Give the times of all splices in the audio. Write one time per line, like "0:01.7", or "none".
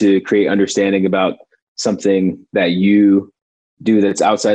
none